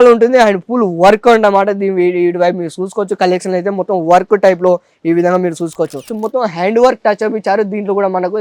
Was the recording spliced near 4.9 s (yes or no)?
no